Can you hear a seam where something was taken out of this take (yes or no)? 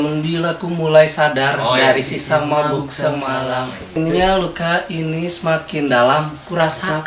yes